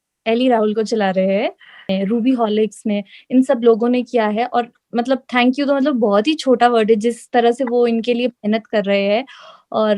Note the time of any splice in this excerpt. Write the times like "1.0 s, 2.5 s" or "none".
1.9 s